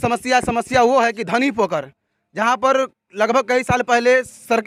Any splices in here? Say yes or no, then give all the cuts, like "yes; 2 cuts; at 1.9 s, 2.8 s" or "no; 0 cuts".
no; 0 cuts